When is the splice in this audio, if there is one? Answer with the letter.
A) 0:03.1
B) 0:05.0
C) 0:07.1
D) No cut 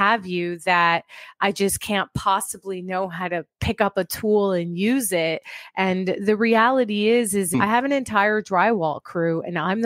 C